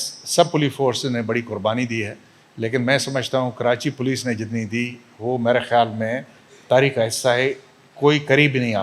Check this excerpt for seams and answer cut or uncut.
uncut